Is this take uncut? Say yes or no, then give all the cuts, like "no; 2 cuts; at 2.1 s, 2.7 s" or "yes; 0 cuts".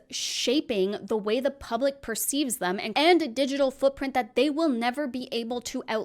no; 1 cut; at 2.9 s